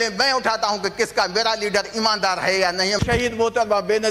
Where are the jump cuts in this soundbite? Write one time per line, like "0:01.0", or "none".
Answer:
0:03.0